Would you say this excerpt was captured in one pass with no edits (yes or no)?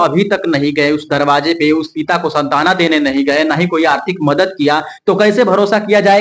yes